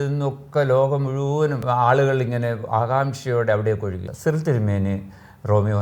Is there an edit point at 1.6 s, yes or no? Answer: yes